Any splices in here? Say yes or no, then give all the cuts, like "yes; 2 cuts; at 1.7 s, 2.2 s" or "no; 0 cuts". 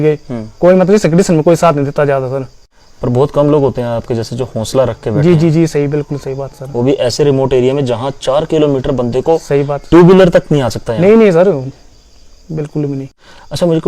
no; 0 cuts